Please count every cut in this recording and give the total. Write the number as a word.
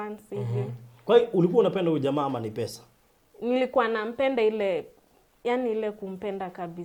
zero